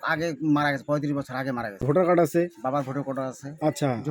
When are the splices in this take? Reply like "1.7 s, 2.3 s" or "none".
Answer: 1.8 s